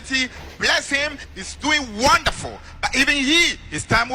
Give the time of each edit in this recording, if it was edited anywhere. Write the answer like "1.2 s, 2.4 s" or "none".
none